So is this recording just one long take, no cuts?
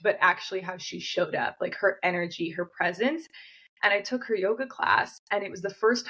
yes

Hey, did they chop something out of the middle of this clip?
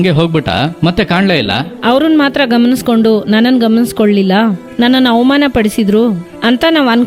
yes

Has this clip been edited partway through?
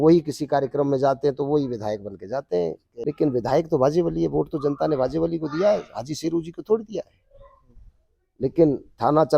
yes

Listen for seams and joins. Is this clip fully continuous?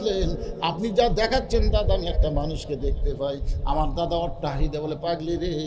yes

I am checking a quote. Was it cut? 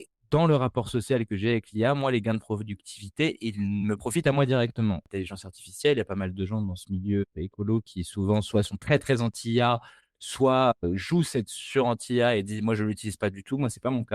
yes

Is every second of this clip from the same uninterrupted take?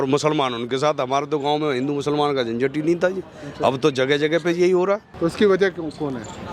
yes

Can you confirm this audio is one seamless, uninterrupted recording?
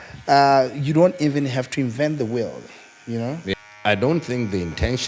no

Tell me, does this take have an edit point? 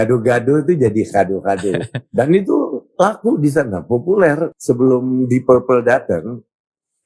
yes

